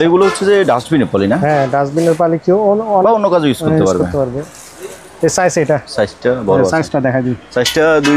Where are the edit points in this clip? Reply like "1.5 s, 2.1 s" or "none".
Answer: none